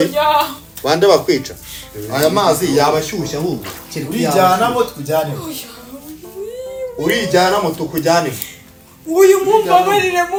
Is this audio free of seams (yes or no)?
yes